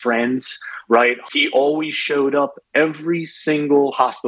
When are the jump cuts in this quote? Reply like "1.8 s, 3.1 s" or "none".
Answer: 0.9 s